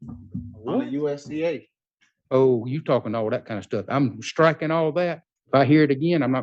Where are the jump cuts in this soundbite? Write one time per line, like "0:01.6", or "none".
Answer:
0:05.3